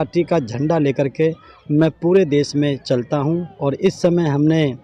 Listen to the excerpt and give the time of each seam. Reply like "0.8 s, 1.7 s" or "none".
none